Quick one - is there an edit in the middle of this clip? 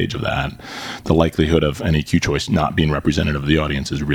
no; 0 cuts

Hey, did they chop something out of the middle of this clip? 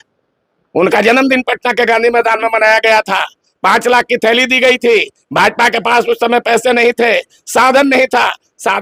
no; 0 cuts

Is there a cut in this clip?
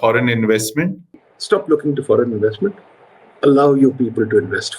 yes; 1 cut; at 1.3 s

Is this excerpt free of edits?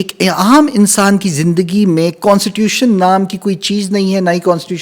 yes; 0 cuts

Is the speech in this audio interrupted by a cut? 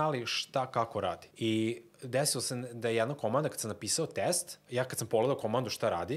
yes; 2 cuts; at 1.3 s, 4.5 s

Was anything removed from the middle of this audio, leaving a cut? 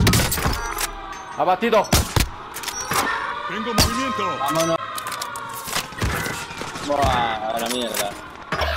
yes; 1 cut; at 4.8 s

